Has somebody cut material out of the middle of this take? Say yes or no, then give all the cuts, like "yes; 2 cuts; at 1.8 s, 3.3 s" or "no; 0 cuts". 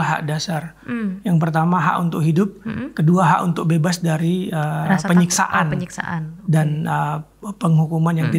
no; 0 cuts